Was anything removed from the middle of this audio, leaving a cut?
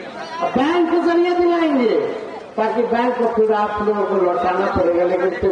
no; 0 cuts

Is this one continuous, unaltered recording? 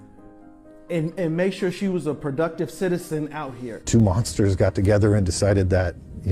no; 1 cut; at 4.0 s

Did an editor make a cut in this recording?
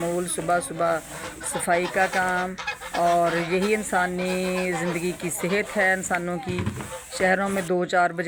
no; 0 cuts

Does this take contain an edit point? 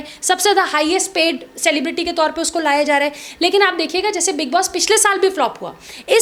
no; 0 cuts

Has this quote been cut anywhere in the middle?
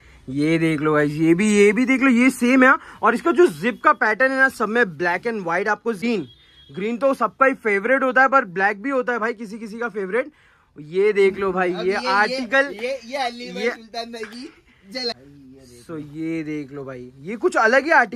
yes; 2 cuts; at 6.0 s, 15.1 s

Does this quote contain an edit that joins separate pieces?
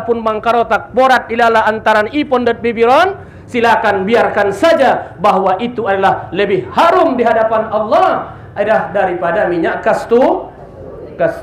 no; 0 cuts

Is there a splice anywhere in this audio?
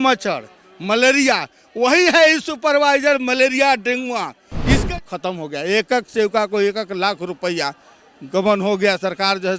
yes; 1 cut; at 4.8 s

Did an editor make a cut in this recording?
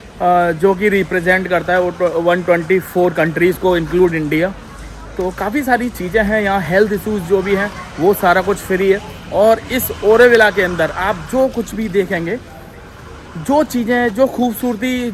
no; 0 cuts

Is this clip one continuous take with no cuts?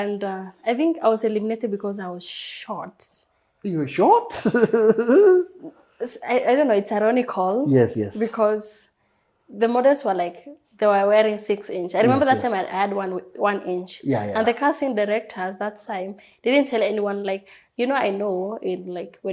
yes; 0 cuts

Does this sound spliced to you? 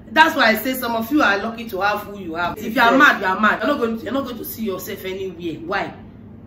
yes; 2 cuts; at 2.6 s, 3.6 s

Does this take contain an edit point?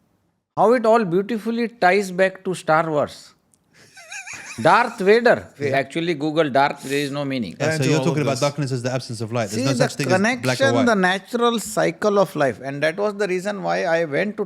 yes; 2 cuts; at 5.6 s, 7.6 s

